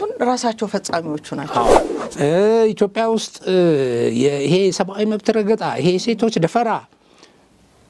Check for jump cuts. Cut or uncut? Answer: cut